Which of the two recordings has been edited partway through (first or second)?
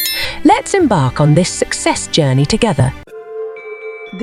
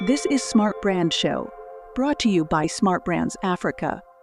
first